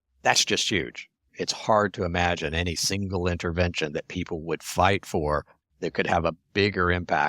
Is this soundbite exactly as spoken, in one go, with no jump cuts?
no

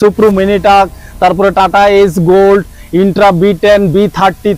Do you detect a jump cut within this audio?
no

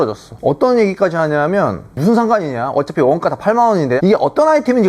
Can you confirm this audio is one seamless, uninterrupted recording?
no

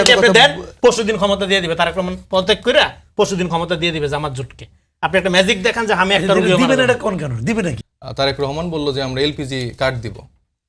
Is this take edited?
no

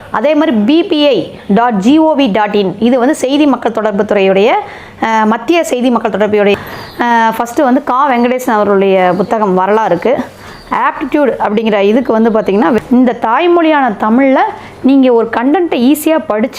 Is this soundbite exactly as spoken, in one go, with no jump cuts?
no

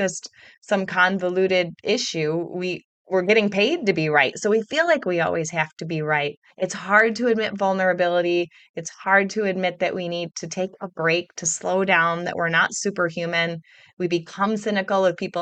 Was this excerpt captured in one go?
yes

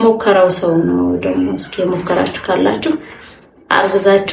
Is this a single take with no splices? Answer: yes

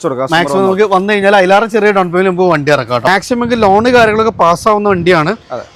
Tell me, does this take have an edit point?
yes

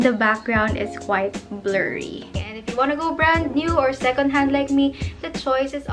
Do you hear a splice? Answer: yes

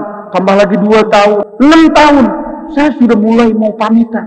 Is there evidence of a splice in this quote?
yes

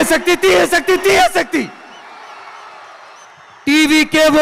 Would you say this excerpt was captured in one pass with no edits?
no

